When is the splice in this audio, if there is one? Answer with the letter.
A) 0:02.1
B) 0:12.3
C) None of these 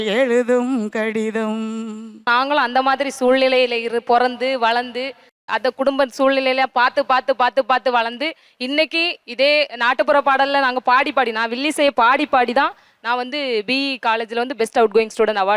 A